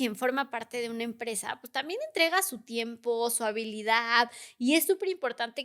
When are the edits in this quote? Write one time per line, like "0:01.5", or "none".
none